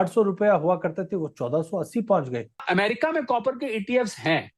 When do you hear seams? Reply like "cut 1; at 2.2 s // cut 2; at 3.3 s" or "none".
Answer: cut 1; at 2.6 s